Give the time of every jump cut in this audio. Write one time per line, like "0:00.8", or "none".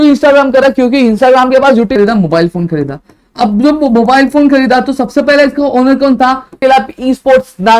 0:01.9
0:06.6